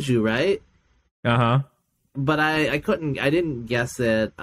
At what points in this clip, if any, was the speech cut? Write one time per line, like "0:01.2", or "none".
none

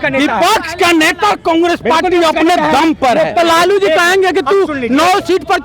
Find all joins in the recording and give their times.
0:03.4

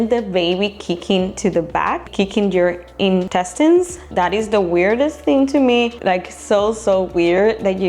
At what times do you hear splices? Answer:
0:02.1
0:03.3
0:04.0
0:05.9

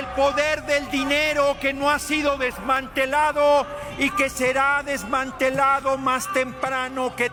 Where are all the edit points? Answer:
none

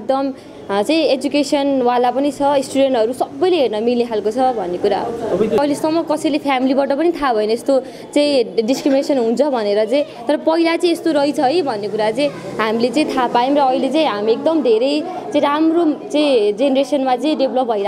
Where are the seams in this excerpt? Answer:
0:05.6

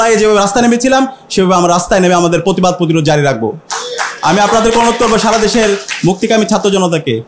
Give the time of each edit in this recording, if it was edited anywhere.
none

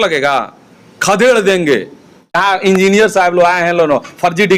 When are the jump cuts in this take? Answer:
0:02.3

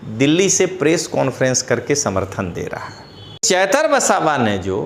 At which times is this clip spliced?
0:03.4

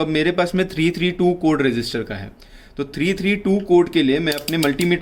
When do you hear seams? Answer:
none

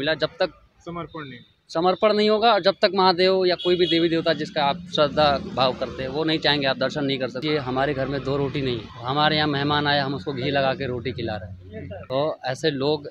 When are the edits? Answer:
0:07.4

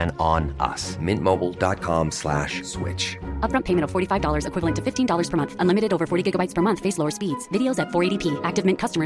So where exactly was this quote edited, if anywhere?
none

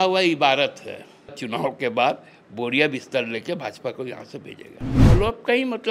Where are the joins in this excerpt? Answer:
0:01.4
0:05.0

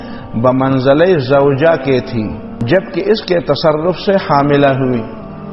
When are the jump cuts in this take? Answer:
0:02.5

